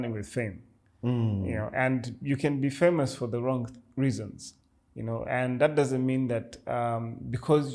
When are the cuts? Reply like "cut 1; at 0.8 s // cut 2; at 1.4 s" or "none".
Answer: none